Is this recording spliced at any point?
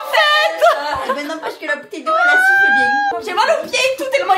yes; 1 cut; at 3.1 s

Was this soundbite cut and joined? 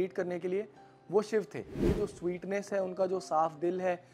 yes; 1 cut; at 1.9 s

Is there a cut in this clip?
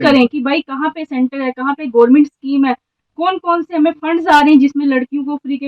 no; 0 cuts

